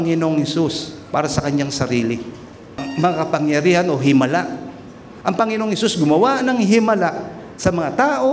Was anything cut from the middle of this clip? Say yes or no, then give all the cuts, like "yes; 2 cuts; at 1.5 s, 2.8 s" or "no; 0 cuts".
yes; 1 cut; at 2.8 s